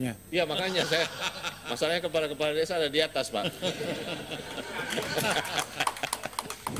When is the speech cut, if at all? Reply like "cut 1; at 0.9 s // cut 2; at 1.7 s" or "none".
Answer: none